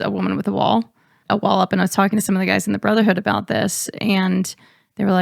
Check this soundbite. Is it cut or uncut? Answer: cut